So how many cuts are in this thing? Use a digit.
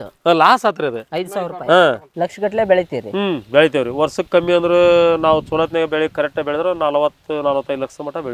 1